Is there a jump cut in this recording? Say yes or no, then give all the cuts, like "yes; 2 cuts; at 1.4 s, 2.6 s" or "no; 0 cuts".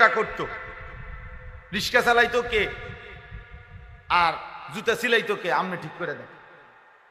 no; 0 cuts